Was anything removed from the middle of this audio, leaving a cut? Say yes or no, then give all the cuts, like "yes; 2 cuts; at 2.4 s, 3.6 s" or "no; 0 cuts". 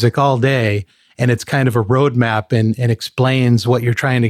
no; 0 cuts